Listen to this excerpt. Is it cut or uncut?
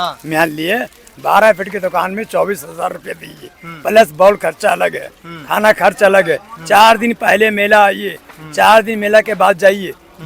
uncut